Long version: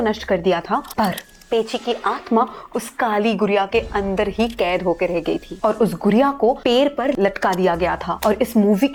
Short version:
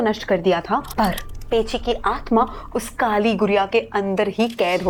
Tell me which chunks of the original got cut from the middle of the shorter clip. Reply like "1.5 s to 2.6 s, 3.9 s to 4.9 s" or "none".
none